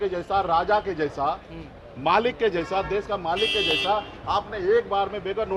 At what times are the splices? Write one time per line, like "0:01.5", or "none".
none